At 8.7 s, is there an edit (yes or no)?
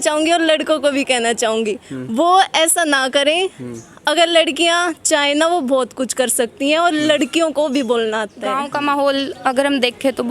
yes